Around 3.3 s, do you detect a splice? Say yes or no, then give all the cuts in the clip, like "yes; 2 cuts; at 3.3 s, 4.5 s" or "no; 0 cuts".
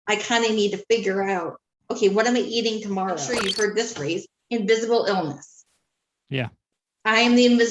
yes; 1 cut; at 3.3 s